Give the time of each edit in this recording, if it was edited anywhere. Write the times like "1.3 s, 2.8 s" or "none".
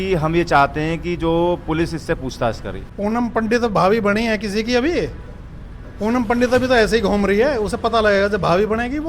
2.8 s